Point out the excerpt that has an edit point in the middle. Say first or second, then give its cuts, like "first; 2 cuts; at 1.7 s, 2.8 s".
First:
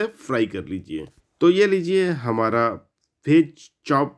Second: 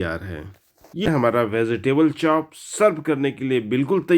second; 1 cut; at 1.1 s